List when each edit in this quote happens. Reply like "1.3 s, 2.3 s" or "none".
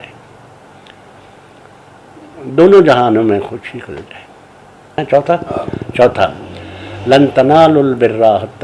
5.0 s